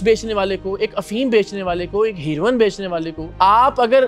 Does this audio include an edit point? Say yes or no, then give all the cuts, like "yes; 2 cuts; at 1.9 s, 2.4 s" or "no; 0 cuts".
yes; 1 cut; at 3.2 s